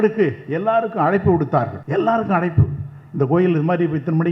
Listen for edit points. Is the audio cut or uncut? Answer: cut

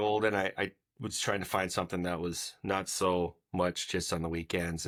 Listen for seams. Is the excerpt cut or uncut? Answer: uncut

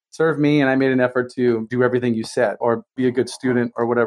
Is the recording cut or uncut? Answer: cut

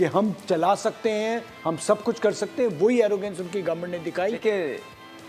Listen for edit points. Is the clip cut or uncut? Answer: cut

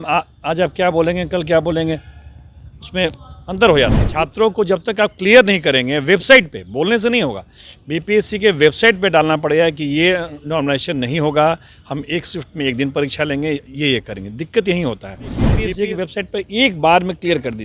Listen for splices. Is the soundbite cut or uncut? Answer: cut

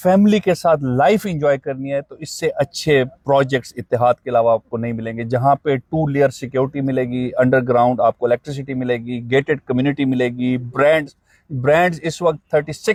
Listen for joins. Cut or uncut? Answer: uncut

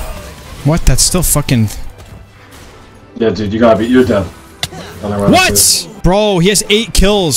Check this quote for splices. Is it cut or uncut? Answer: uncut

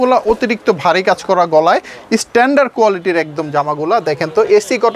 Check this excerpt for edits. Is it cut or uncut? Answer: uncut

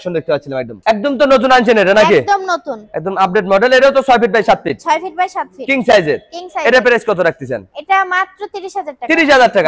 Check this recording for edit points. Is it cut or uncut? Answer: uncut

